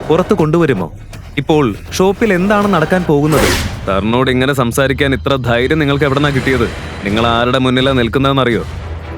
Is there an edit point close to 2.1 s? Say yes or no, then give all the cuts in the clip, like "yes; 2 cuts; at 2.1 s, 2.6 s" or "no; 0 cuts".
no; 1 cut; at 3.7 s